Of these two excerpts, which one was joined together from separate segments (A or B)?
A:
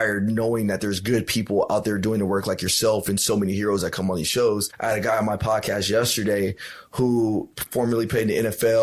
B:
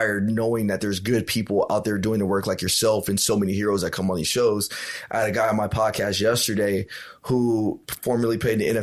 A